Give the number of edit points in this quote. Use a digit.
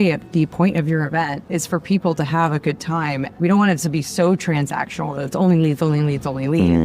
2